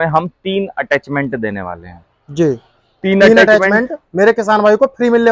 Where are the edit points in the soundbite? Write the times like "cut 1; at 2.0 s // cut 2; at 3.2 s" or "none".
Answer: none

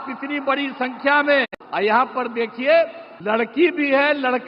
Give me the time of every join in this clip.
cut 1; at 1.6 s // cut 2; at 3.1 s

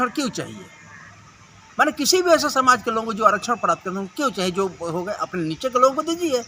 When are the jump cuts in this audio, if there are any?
none

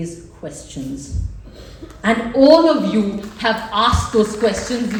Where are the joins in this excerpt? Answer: none

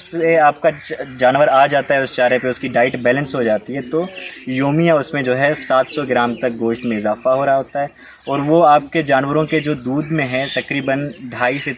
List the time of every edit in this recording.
none

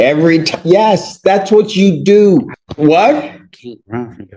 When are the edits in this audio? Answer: cut 1; at 2.6 s

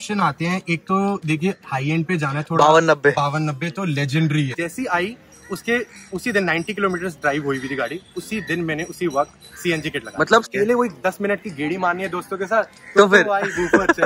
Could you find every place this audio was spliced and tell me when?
cut 1; at 4.5 s // cut 2; at 10.5 s

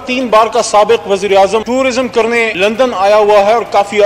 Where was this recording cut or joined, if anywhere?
none

